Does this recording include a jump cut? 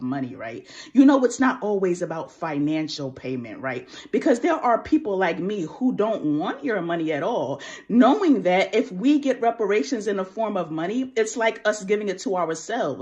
yes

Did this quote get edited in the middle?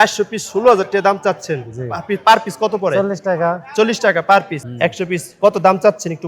yes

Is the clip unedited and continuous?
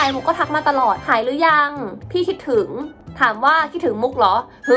no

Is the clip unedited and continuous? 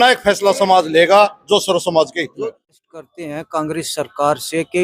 no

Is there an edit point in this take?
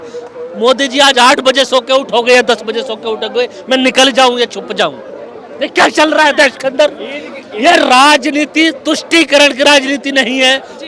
no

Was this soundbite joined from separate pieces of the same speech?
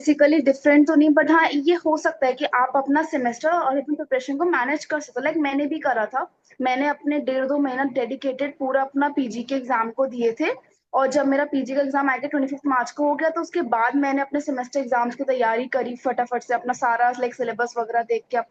no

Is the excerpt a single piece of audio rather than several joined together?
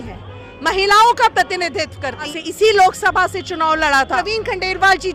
no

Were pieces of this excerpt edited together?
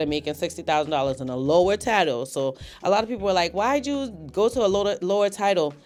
no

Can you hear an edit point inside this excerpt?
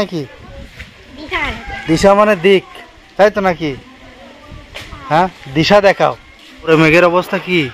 yes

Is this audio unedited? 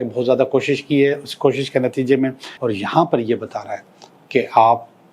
no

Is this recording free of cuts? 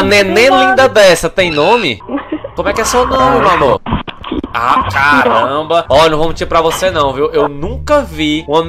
no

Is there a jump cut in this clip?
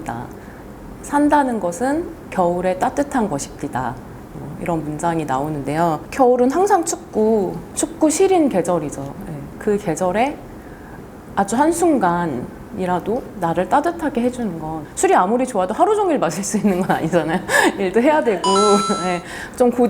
no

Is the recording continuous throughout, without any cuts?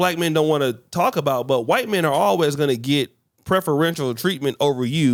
yes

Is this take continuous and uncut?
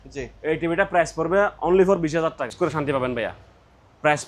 no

